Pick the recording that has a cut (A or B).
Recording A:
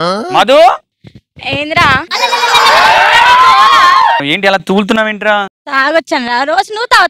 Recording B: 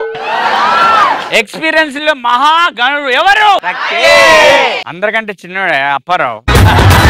A